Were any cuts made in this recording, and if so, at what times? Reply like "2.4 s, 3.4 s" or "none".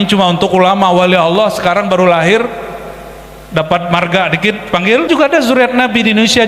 5.1 s